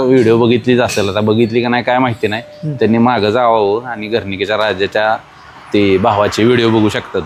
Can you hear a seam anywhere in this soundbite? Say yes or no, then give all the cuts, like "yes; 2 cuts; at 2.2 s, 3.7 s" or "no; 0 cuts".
no; 0 cuts